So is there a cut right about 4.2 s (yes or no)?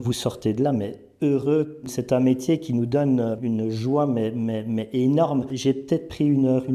no